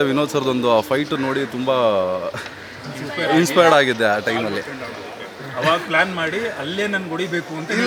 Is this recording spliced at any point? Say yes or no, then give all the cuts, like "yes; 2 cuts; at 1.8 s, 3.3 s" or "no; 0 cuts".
no; 0 cuts